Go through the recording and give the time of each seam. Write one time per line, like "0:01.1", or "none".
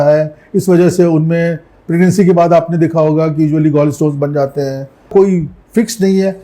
0:05.1